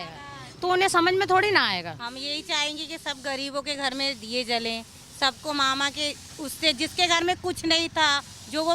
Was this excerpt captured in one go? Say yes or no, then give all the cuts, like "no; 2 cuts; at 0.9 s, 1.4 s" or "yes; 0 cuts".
no; 1 cut; at 2.0 s